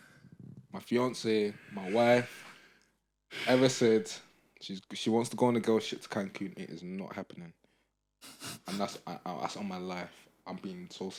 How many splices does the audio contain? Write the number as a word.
zero